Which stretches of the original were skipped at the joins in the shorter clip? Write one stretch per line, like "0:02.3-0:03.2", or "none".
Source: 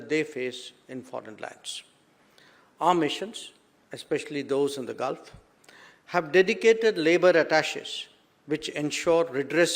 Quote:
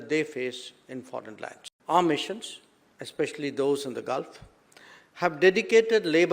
0:01.7-0:02.6